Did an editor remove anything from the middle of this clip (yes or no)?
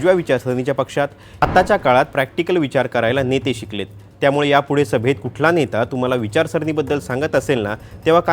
yes